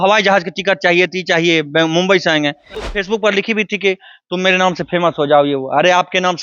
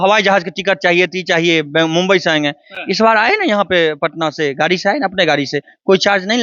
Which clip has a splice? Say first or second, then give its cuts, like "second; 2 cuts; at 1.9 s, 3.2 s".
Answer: first; 1 cut; at 2.7 s